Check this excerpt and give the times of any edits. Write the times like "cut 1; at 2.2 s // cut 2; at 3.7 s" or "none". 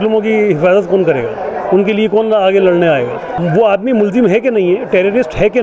cut 1; at 3.3 s